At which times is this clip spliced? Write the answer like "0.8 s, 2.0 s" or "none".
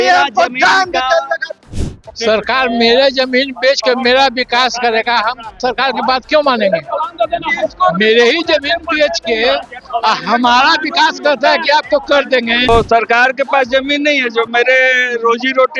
1.6 s, 12.7 s